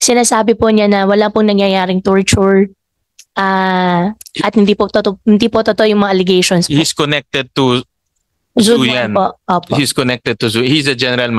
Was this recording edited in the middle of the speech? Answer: no; 0 cuts

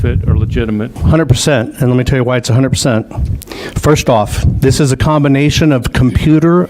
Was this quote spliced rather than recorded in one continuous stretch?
yes; 1 cut; at 1.0 s

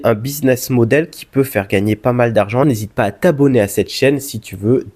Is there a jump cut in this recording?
yes; 1 cut; at 2.6 s

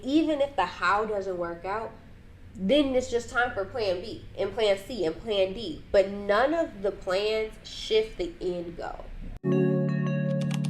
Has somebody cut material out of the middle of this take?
yes; 1 cut; at 9.4 s

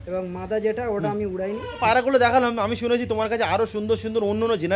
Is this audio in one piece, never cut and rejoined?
no; 1 cut; at 1.8 s

